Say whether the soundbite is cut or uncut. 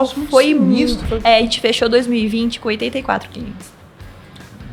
cut